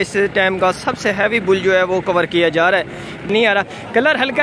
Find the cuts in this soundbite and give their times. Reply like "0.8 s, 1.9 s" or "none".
3.3 s